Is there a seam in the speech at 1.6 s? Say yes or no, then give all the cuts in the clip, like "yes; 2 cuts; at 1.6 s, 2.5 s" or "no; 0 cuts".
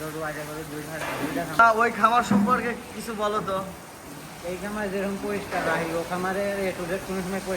yes; 1 cut; at 1.6 s